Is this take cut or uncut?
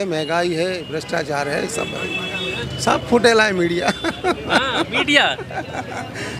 cut